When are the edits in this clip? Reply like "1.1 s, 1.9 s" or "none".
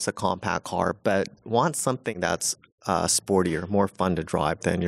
2.1 s